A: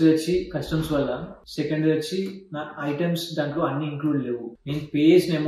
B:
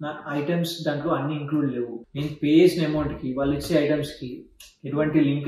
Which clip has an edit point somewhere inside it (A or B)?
A